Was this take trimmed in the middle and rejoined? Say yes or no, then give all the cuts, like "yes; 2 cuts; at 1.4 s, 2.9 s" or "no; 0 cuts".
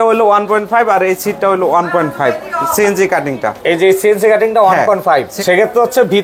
no; 0 cuts